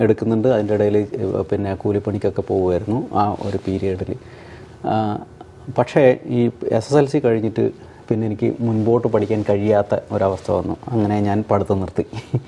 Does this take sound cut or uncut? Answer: uncut